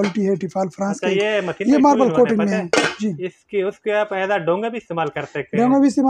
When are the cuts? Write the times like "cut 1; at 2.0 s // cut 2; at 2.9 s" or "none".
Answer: none